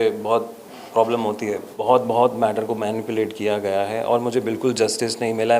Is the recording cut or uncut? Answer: cut